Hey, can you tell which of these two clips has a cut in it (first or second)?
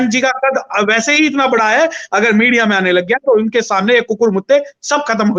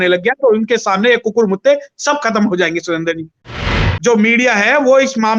second